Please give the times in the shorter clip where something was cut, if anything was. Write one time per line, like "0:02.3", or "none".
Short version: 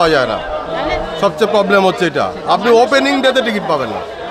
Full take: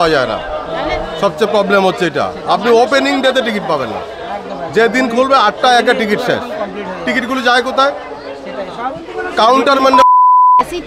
none